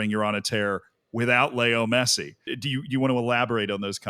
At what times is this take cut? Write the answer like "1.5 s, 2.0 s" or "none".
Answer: 2.5 s

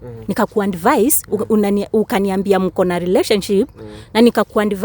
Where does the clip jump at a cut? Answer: none

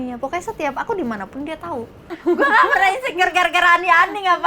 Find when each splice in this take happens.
2.1 s

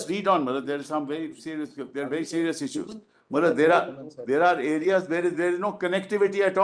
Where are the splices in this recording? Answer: none

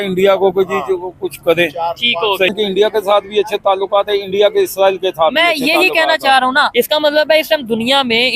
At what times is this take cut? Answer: 2.5 s, 6.7 s

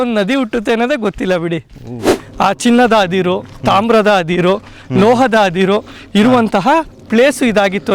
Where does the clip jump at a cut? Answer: 2.2 s

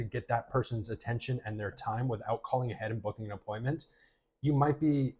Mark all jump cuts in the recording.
none

